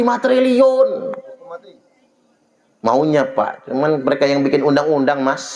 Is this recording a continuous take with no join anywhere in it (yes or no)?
yes